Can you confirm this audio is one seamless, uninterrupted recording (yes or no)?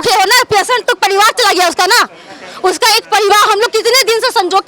yes